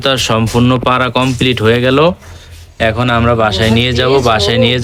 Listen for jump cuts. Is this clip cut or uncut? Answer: uncut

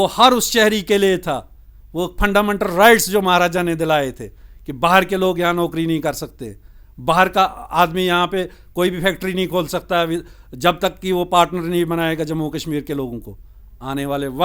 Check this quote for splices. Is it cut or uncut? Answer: uncut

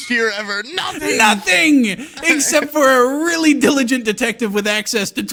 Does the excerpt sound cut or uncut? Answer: uncut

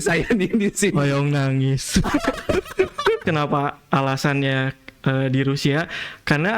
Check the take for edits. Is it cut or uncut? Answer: cut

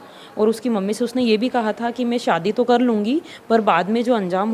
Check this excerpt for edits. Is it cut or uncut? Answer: uncut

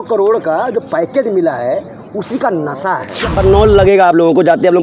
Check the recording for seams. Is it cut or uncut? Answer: cut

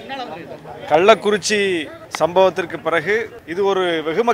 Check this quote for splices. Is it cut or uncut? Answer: cut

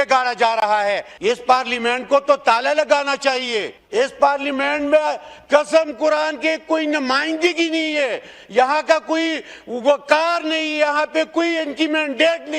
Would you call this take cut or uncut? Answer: cut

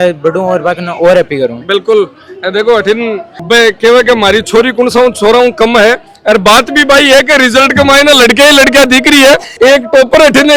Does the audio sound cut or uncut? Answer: uncut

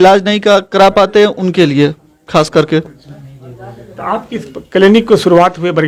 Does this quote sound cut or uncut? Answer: uncut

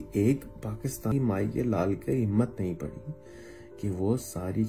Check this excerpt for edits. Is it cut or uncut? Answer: cut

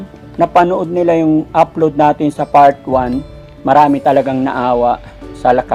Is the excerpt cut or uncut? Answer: uncut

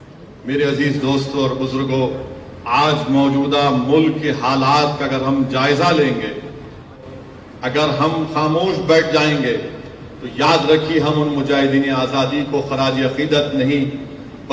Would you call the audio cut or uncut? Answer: cut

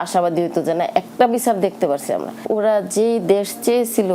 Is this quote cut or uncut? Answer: uncut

